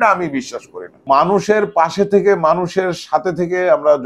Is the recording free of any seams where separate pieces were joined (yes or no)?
no